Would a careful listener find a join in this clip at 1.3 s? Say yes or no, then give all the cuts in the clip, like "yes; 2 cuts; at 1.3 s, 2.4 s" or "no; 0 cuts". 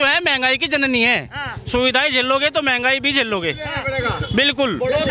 no; 0 cuts